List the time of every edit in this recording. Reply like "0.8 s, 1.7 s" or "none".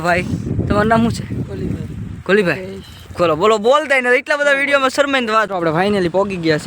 5.5 s